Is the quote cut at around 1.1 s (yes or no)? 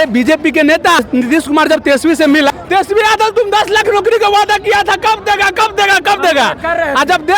yes